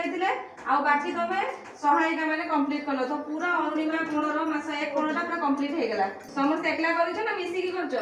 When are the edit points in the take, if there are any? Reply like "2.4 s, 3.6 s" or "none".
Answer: 6.2 s